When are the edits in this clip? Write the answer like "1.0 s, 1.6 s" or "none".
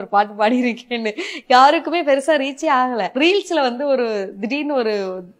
3.2 s